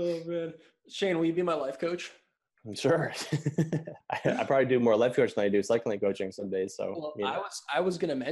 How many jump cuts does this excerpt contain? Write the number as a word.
one